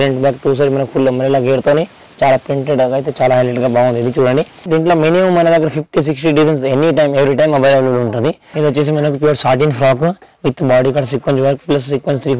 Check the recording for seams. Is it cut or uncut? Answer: cut